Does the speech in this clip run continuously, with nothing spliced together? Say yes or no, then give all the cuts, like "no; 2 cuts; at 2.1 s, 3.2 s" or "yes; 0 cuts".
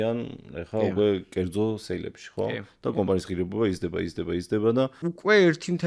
no; 1 cut; at 5.0 s